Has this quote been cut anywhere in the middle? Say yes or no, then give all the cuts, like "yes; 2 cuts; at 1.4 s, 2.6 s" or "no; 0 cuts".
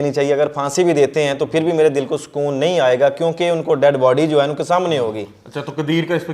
no; 0 cuts